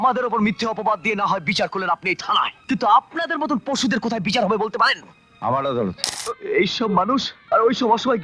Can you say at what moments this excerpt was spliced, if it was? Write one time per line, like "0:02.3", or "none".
0:02.6
0:06.1
0:07.3

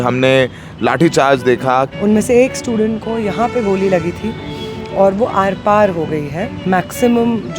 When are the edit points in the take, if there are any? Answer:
0:01.9
0:06.5

